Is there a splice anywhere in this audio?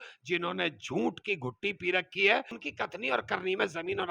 yes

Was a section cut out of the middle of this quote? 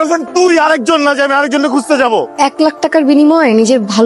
yes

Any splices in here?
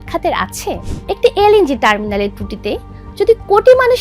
yes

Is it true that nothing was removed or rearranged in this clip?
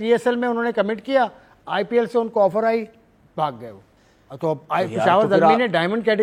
yes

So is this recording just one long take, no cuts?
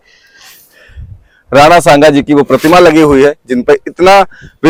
yes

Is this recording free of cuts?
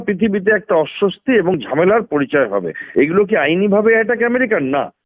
no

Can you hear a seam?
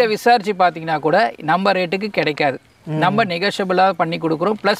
no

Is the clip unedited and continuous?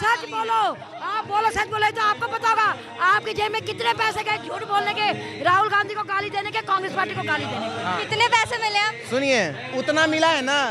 yes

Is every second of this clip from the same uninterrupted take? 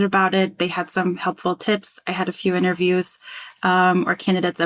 yes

